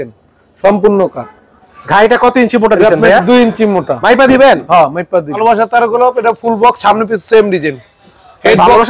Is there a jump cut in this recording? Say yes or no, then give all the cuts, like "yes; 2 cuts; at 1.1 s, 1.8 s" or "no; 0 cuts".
yes; 1 cut; at 5.4 s